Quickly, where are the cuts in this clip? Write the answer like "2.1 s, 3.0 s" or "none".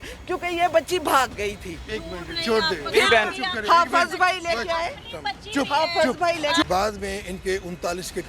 6.6 s